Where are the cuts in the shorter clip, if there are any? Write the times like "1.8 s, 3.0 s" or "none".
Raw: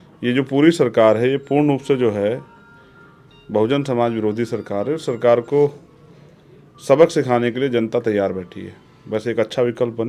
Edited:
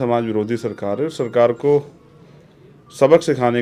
none